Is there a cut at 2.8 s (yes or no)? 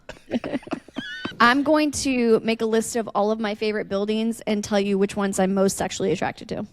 no